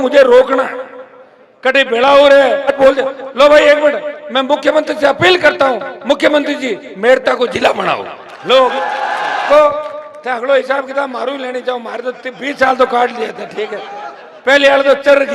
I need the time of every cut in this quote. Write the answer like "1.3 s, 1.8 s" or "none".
2.7 s, 9.5 s